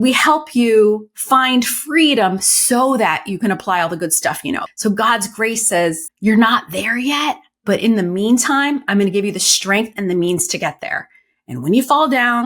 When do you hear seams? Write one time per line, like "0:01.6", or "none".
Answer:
0:04.7
0:06.1

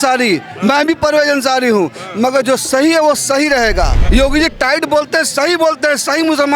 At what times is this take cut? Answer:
0:04.0

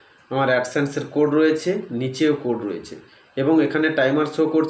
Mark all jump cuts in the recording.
none

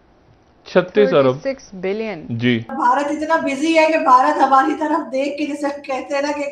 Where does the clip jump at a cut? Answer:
0:02.7

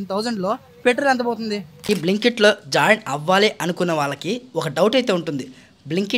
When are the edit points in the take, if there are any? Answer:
0:01.8

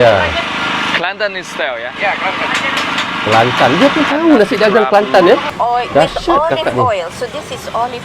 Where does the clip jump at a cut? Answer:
0:05.5

